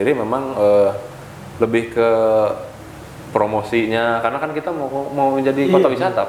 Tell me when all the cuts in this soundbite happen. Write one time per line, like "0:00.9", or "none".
none